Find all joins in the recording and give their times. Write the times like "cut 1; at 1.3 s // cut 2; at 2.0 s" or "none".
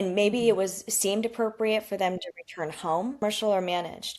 cut 1; at 3.2 s

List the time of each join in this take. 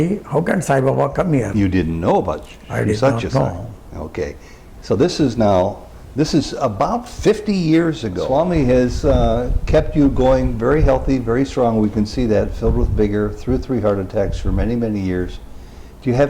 cut 1; at 8.2 s

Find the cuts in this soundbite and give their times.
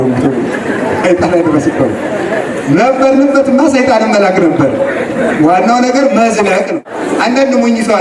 cut 1; at 7.0 s

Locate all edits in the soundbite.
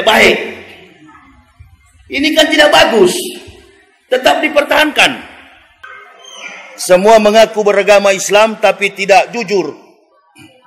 cut 1; at 5.9 s

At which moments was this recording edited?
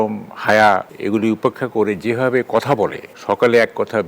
cut 1; at 0.9 s // cut 2; at 3.1 s

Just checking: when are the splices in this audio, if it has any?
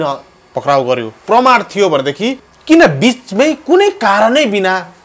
cut 1; at 2.5 s

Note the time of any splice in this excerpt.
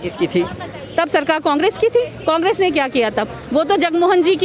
none

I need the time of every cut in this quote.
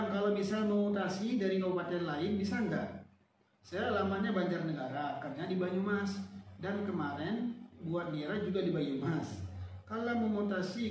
none

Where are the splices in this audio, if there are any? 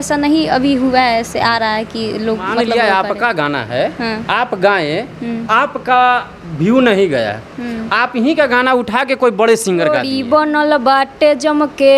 cut 1; at 2.7 s // cut 2; at 10.0 s

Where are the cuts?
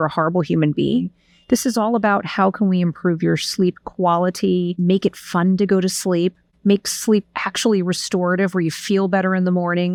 none

